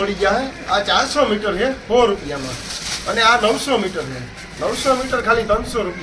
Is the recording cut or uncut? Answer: uncut